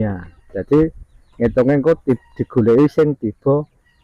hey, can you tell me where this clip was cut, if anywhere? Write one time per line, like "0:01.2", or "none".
none